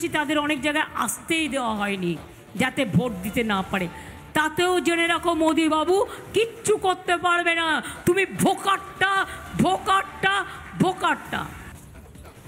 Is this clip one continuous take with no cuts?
no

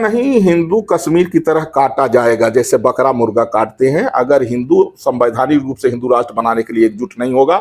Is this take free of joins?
yes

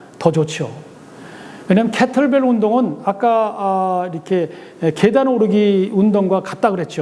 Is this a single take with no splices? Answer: yes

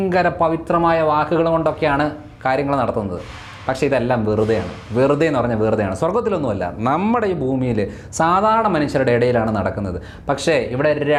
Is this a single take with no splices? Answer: yes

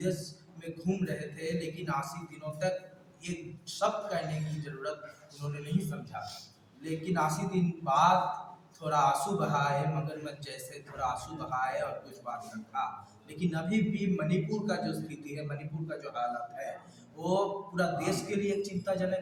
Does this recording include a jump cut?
no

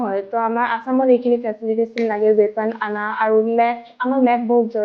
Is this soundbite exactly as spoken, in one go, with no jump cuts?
yes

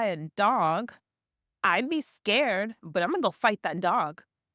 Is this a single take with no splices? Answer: yes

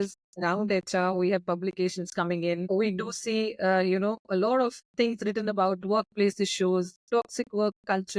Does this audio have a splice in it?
no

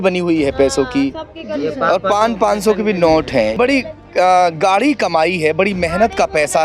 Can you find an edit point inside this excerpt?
yes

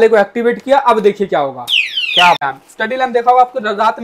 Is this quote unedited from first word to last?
no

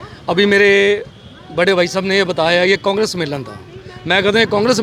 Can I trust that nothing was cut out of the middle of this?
yes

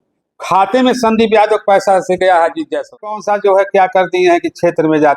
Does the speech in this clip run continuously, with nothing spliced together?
no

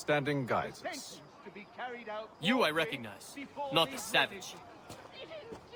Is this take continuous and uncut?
yes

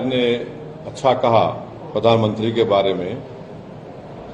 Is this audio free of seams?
yes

